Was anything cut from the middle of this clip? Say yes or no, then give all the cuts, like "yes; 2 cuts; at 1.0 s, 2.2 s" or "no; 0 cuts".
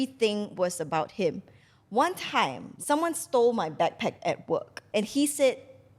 yes; 2 cuts; at 2.6 s, 4.8 s